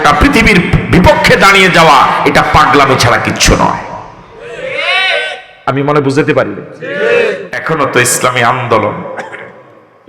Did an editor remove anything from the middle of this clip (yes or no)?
yes